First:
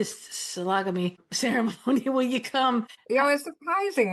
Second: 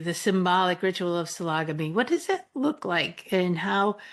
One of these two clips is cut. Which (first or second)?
first